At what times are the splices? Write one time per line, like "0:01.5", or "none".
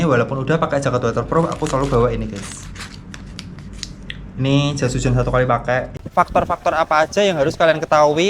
0:05.9